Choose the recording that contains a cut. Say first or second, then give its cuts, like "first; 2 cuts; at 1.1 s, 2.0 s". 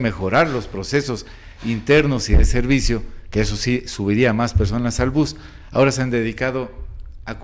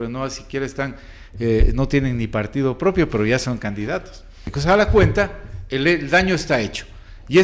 second; 1 cut; at 4.5 s